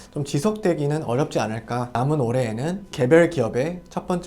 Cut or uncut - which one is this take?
cut